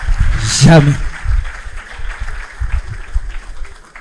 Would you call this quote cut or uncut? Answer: uncut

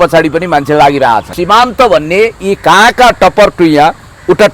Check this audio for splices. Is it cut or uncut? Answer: cut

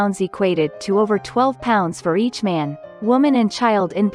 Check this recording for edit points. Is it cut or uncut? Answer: uncut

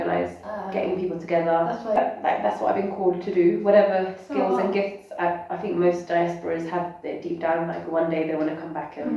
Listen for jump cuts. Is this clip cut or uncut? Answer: cut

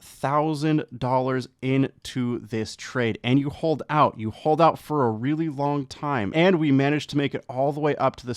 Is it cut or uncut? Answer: uncut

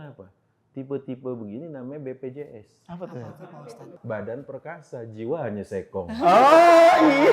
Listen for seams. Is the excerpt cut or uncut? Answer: cut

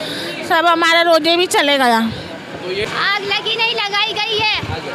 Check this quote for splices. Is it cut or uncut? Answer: cut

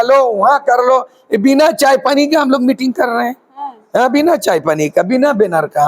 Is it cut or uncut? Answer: uncut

